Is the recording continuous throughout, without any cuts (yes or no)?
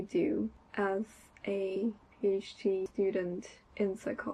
yes